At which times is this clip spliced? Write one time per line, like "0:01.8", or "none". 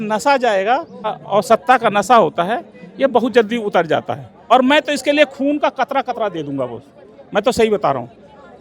0:01.2
0:04.3